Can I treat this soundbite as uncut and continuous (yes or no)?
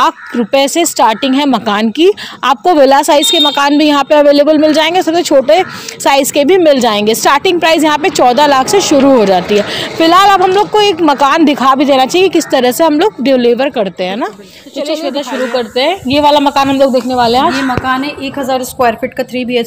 yes